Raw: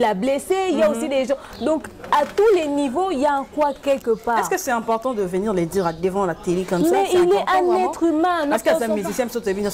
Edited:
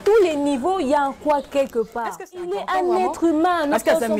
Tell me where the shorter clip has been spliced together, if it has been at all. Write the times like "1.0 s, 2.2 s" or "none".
2.5 s